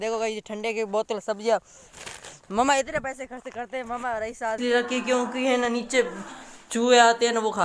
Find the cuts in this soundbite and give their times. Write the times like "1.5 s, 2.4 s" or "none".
4.6 s